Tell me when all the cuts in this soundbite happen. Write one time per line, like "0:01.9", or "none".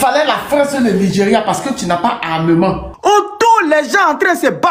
0:02.9